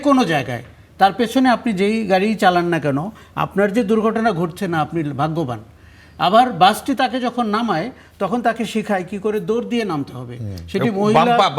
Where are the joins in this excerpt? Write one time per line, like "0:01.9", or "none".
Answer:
none